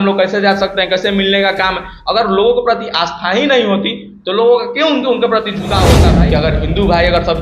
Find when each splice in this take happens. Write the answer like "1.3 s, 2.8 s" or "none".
6.0 s